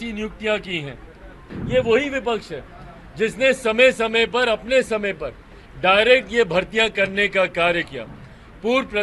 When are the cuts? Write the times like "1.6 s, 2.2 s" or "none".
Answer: 1.5 s